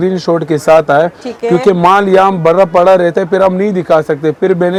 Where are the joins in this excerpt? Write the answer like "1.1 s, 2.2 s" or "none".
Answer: none

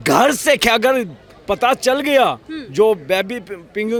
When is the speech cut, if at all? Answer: none

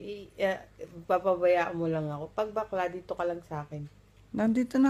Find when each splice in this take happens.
3.0 s

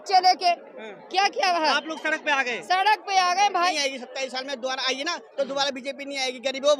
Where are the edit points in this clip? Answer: 3.7 s

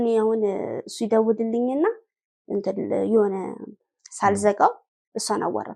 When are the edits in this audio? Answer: none

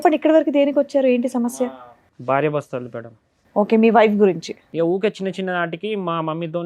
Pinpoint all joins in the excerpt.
4.6 s

